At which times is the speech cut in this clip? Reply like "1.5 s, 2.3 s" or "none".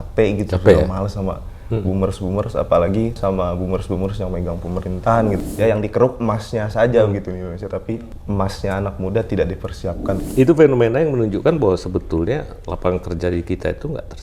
3.2 s, 5.4 s, 8.1 s, 10.2 s